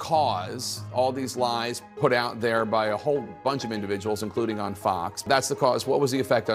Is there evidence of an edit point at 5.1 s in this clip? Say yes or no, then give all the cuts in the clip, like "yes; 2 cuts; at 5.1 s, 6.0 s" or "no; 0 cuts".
yes; 1 cut; at 5.1 s